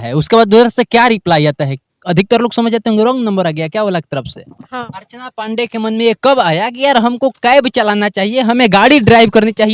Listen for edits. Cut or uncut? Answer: cut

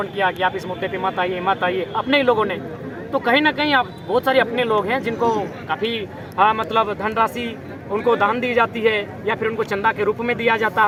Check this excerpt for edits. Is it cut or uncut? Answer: uncut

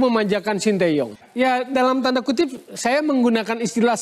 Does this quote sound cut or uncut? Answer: cut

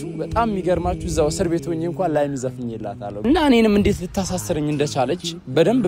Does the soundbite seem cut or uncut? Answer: cut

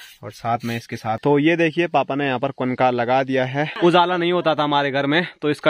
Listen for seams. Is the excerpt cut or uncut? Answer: cut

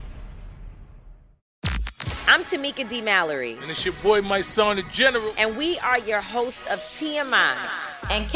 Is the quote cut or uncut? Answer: cut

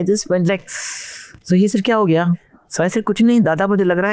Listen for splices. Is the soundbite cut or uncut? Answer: cut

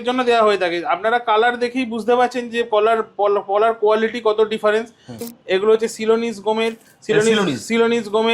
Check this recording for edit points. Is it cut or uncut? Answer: cut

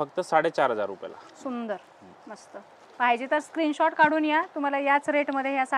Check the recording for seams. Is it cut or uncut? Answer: uncut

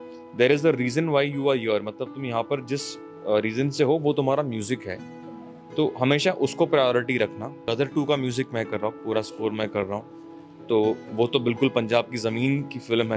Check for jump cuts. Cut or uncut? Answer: cut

